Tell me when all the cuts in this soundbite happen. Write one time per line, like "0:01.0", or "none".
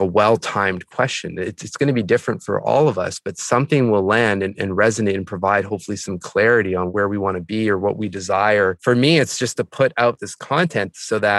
0:06.9
0:08.8
0:10.3